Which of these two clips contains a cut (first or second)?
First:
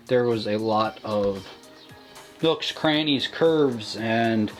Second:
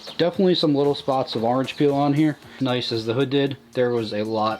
second